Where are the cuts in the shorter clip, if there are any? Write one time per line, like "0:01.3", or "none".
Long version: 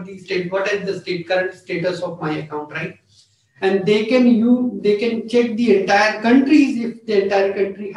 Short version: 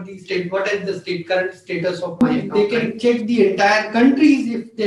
0:02.2